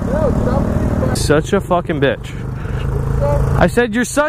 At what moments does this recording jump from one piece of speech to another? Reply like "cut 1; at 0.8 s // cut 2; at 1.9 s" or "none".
cut 1; at 1.2 s